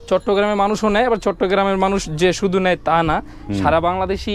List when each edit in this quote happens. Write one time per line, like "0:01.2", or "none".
none